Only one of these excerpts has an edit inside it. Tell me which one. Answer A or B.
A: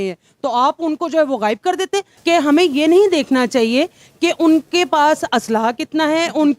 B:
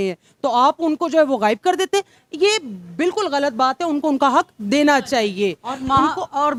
A